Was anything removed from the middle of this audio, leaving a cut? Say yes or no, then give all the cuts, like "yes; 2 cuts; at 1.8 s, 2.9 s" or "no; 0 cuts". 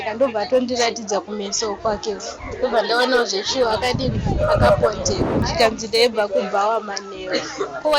yes; 1 cut; at 5.4 s